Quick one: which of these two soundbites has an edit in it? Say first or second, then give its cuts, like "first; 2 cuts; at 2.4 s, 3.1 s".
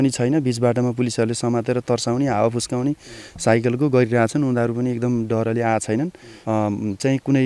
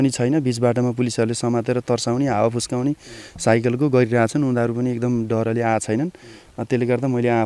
first; 1 cut; at 6.3 s